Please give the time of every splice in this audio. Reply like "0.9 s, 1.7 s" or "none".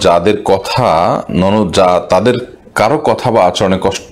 1.3 s